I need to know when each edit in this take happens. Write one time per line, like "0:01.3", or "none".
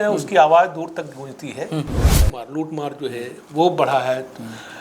0:02.3